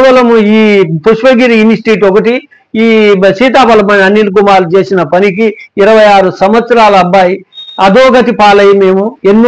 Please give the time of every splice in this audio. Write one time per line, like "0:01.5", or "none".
none

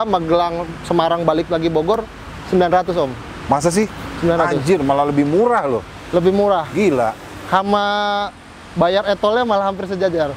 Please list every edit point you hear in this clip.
none

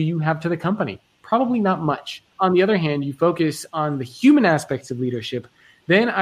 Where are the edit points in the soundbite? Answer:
0:02.3

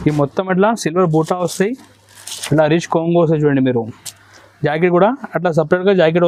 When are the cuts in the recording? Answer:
none

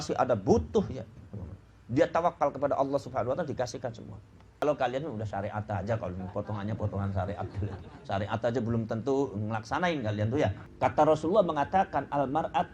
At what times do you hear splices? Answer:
0:04.6
0:10.6

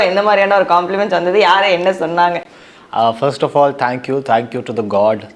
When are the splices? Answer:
none

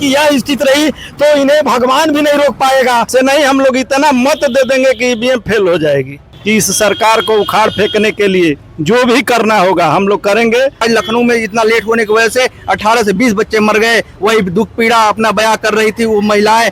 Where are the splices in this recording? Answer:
0:03.1
0:06.3
0:08.7
0:10.8

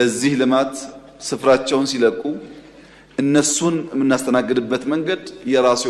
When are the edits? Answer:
none

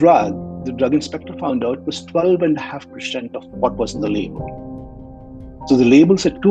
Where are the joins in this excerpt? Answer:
none

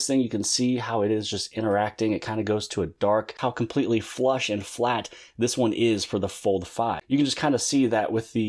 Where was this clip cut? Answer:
0:03.3
0:07.0

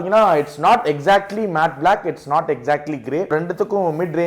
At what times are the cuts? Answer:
0:03.3

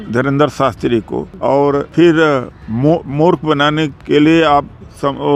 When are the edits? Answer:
0:01.6
0:04.0

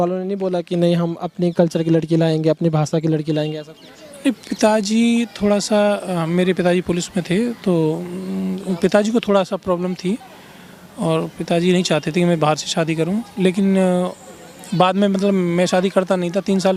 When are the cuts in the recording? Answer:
none

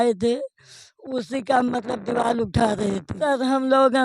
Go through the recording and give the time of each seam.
0:03.1

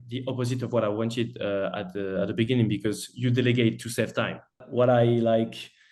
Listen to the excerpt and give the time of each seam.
0:04.6

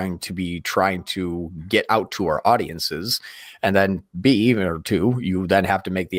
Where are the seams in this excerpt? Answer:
none

